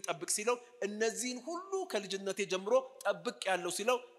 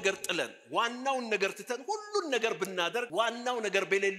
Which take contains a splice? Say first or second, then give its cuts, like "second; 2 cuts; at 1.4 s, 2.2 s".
second; 1 cut; at 3.1 s